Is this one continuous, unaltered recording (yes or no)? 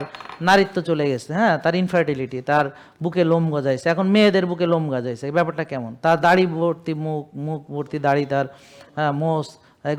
yes